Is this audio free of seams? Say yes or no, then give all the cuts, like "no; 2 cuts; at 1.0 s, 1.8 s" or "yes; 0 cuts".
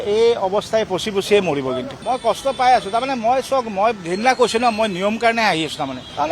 no; 1 cut; at 1.9 s